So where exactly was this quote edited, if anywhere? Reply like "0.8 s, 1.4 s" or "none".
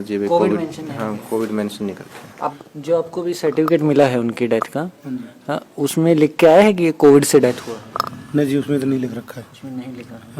2.3 s